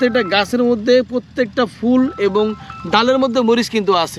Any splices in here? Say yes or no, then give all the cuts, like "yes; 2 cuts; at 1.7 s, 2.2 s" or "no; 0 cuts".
no; 0 cuts